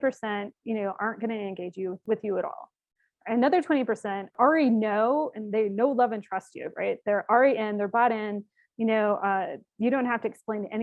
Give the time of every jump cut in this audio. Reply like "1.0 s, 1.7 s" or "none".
2.0 s, 4.3 s